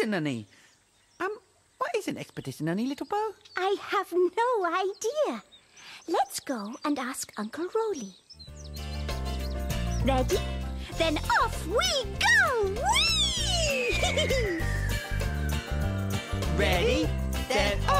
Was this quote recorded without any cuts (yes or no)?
no